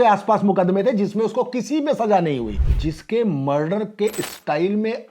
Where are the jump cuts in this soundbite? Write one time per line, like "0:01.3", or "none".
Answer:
0:02.6